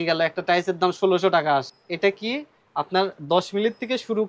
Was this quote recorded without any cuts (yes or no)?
no